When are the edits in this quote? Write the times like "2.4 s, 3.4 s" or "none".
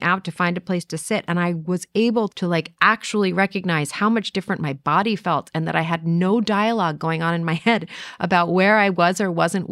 2.3 s